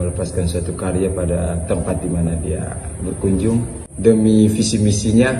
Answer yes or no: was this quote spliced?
yes